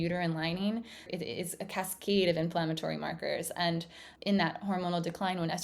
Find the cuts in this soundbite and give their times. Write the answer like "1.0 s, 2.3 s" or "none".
1.1 s, 4.1 s